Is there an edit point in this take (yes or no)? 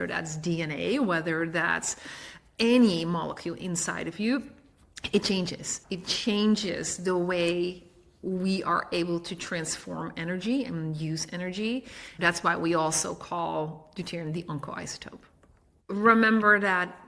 yes